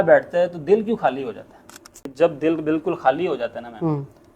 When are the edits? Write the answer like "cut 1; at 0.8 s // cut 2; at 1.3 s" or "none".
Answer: cut 1; at 2.0 s